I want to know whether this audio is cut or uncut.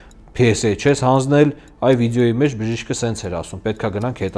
uncut